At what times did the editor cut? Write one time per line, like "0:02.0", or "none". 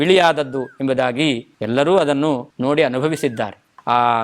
0:01.5
0:02.5